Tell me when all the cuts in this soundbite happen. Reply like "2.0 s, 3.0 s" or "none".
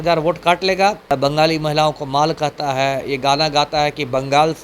1.0 s